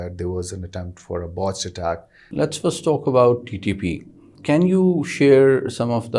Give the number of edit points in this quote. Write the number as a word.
two